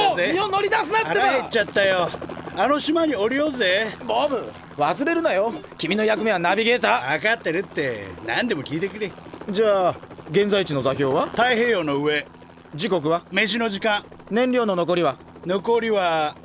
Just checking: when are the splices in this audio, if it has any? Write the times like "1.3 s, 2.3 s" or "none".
11.9 s